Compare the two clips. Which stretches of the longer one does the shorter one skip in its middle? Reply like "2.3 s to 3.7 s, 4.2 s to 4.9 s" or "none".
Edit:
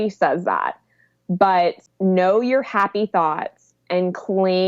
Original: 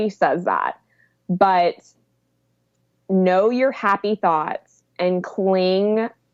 1.9 s to 2.9 s